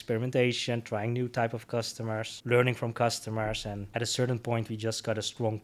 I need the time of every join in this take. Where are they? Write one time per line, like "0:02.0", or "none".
0:02.3
0:03.8